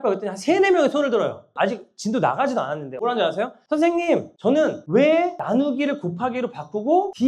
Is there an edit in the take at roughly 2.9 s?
yes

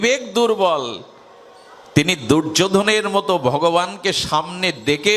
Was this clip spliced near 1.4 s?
no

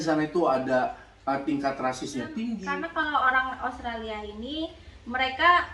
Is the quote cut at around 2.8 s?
yes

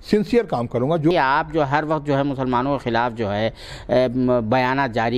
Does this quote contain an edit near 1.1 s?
yes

